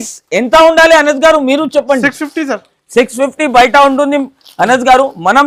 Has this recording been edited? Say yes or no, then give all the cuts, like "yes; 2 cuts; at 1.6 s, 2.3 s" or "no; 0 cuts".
no; 0 cuts